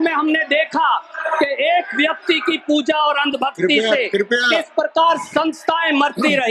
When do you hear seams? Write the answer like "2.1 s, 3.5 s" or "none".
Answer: none